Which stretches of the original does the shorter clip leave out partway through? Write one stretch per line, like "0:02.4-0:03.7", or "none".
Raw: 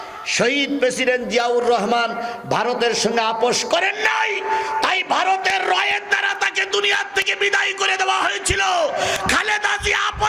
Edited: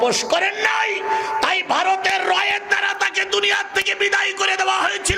none